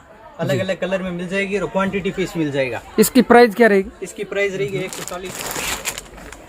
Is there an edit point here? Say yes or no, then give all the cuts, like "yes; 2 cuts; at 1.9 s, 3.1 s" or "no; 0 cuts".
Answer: yes; 1 cut; at 5.1 s